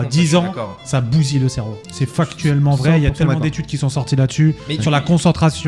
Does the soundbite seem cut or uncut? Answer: uncut